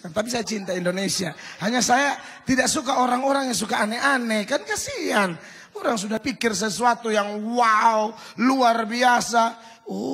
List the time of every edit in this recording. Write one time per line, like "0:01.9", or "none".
0:06.2